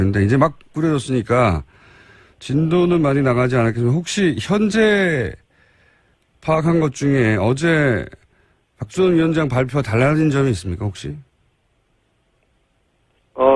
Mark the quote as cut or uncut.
uncut